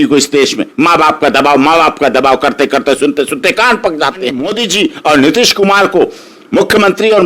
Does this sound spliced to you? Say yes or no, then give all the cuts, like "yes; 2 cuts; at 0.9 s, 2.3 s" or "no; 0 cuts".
yes; 1 cut; at 4.6 s